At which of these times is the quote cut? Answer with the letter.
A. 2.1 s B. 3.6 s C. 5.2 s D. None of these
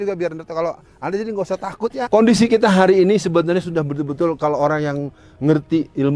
A